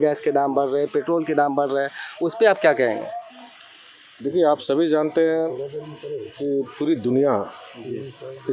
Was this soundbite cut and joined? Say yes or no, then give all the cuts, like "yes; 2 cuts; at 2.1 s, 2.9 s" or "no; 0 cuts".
no; 0 cuts